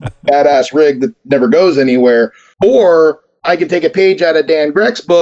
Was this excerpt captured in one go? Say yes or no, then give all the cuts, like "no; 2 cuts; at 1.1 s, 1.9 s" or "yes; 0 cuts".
no; 2 cuts; at 2.4 s, 3.3 s